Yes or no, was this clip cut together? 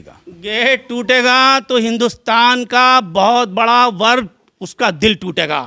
no